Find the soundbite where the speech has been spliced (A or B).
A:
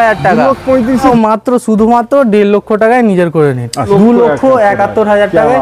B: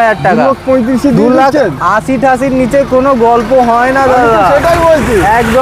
A